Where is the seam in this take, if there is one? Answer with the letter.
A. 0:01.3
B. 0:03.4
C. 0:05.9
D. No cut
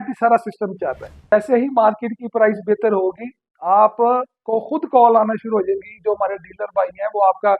A